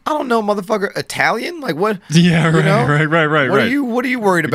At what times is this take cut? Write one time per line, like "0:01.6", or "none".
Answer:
none